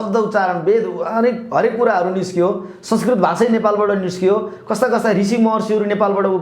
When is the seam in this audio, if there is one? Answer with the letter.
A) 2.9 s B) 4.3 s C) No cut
C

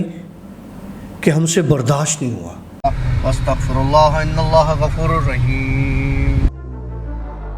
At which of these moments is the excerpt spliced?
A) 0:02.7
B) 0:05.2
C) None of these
A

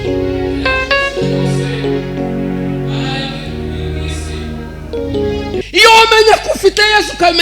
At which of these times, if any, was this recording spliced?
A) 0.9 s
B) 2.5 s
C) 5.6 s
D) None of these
C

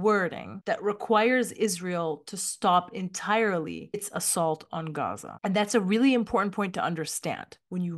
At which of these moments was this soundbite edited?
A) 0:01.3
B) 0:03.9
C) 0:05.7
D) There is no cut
D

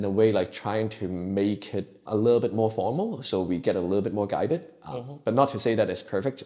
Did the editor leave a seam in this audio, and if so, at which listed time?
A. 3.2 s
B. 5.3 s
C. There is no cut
C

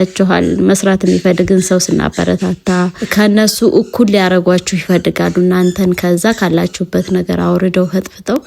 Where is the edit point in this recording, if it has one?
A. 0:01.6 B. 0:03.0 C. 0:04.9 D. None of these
B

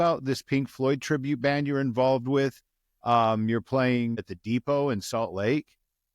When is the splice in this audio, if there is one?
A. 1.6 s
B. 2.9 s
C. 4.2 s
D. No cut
C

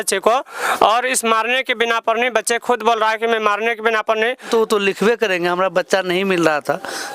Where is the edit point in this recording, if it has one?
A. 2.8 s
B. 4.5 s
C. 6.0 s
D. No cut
B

